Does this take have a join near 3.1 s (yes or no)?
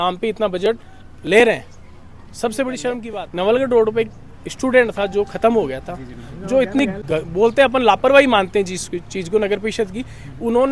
yes